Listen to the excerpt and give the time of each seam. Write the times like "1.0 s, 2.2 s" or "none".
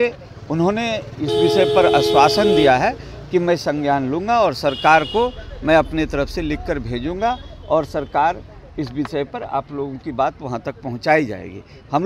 none